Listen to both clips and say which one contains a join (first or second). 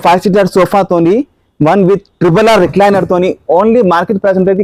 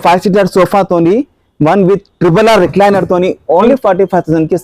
second